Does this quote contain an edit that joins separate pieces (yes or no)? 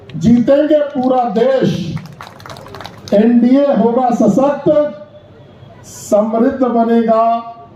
no